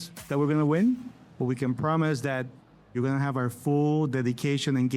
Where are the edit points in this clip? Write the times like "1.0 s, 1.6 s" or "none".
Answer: none